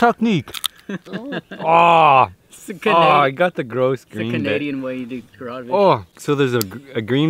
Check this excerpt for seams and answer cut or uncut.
cut